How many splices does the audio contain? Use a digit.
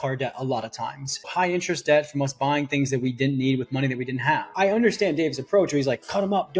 2